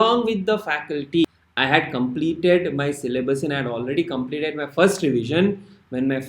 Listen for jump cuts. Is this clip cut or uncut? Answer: cut